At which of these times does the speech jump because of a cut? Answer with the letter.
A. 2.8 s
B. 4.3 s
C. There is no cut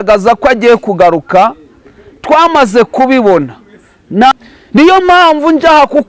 B